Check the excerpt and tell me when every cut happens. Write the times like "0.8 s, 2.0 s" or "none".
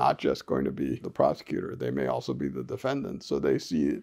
1.1 s

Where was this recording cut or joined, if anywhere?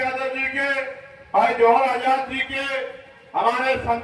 none

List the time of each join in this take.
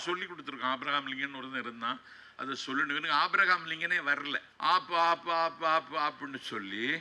4.5 s

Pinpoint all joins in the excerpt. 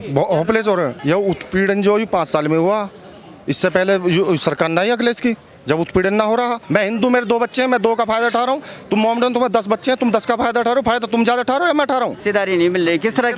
1.0 s, 6.6 s, 12.2 s

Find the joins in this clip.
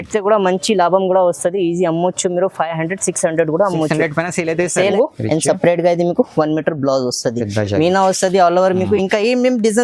4.9 s

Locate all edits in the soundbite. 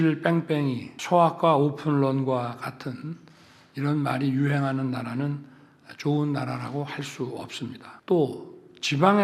0.9 s, 7.9 s

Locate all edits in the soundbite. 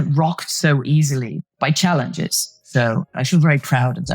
1.3 s, 3.0 s

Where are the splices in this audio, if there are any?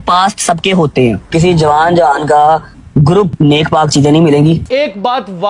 3.3 s, 4.6 s

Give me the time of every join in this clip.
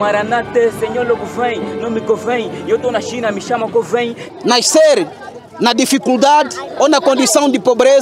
4.2 s

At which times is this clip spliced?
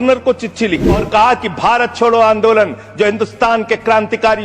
1.0 s

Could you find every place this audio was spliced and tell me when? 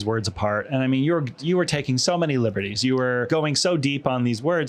3.3 s

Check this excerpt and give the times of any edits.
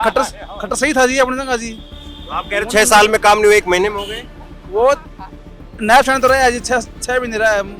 none

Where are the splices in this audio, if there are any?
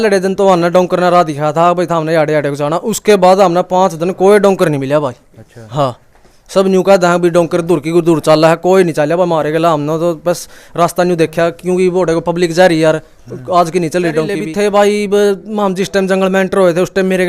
14.5 s

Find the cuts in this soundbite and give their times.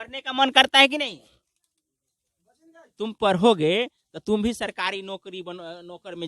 none

